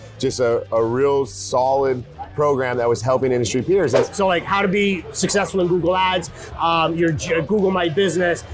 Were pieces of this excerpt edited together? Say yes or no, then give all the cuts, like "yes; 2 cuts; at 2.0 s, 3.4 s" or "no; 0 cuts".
yes; 1 cut; at 4.0 s